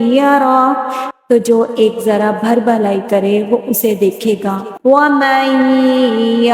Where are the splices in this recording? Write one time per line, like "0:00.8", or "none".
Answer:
0:01.0
0:04.7